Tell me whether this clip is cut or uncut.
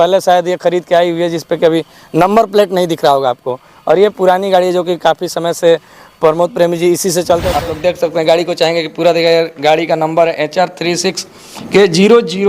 cut